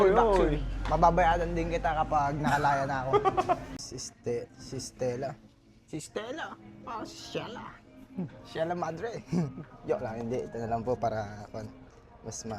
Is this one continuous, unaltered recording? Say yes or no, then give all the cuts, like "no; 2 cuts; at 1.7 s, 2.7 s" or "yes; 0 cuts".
no; 1 cut; at 3.8 s